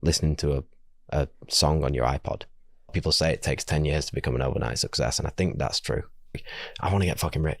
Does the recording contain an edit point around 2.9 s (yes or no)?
yes